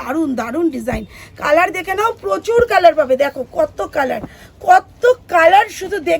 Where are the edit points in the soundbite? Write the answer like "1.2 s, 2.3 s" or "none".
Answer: none